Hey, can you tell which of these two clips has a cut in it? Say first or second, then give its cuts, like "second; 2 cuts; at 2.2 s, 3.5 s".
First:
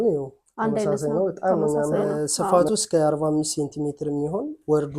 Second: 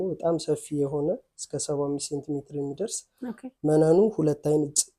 first; 1 cut; at 2.1 s